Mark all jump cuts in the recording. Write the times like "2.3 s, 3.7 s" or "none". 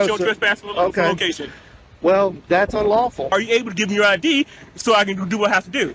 3.3 s